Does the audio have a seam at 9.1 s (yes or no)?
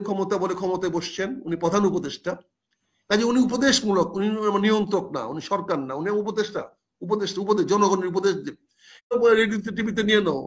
yes